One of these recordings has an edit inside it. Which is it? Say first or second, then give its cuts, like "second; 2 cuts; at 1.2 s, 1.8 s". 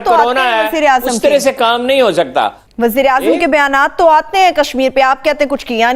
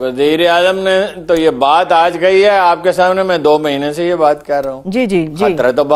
first; 1 cut; at 2.6 s